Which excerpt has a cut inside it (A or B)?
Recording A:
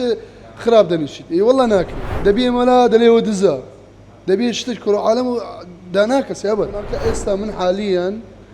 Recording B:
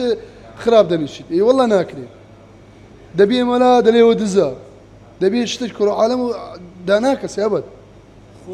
A